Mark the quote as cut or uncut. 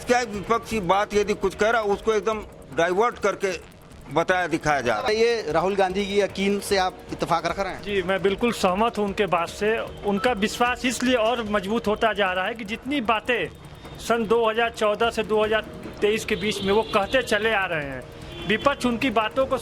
cut